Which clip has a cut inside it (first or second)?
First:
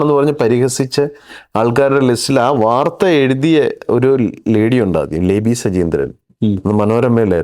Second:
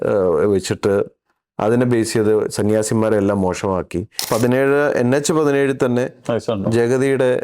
second